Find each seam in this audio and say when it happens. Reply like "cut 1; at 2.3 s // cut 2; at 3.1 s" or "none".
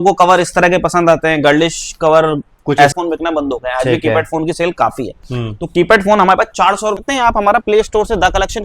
cut 1; at 2.9 s // cut 2; at 7.0 s